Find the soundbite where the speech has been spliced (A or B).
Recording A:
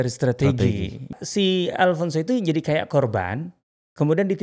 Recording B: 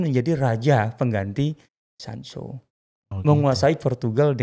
A